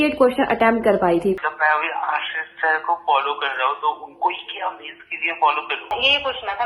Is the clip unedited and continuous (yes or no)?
no